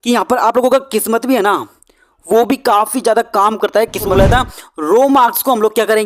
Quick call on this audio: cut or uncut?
cut